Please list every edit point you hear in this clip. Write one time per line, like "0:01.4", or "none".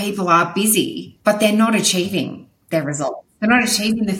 0:01.0
0:03.3